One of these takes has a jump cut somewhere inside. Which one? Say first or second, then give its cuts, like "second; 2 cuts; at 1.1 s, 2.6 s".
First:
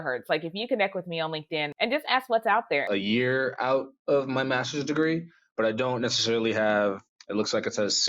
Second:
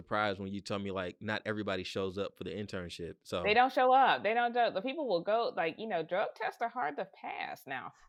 first; 2 cuts; at 1.7 s, 2.8 s